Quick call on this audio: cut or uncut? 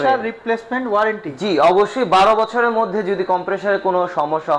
uncut